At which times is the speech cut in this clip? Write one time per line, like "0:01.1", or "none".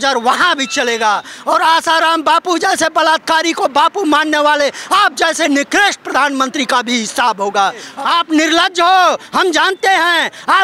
0:01.3
0:07.9